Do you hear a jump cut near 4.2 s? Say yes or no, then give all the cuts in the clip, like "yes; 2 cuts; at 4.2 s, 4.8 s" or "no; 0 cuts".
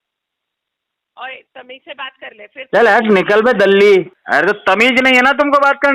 yes; 1 cut; at 4.2 s